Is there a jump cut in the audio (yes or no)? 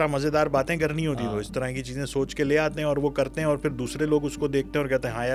no